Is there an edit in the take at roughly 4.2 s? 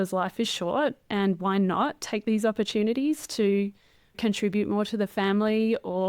yes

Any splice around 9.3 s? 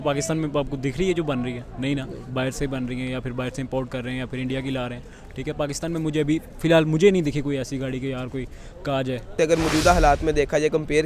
yes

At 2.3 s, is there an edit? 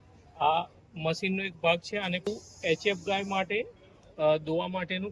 yes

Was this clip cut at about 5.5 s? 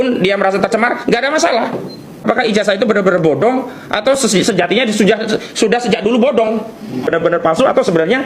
no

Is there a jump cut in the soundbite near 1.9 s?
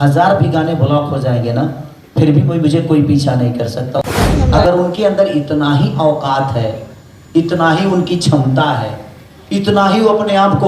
no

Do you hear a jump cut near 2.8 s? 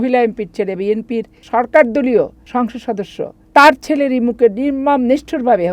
yes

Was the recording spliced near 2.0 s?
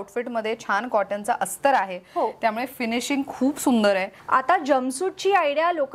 no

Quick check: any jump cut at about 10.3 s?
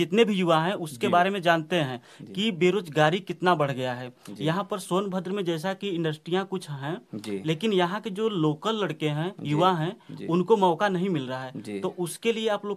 no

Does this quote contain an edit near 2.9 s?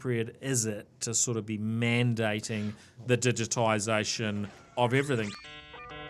no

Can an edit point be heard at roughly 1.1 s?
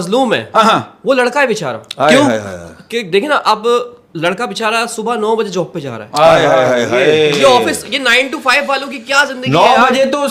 no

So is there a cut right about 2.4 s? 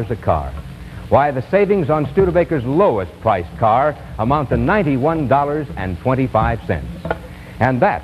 no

